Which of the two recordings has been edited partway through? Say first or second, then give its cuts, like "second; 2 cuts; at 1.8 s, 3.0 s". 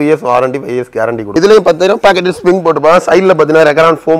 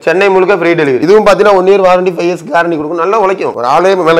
first; 1 cut; at 1.2 s